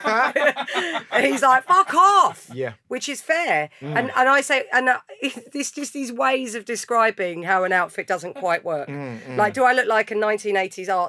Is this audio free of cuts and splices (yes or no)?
yes